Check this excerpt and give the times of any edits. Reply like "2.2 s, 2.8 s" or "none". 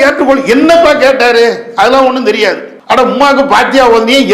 2.7 s